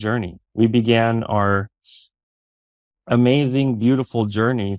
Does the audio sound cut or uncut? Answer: uncut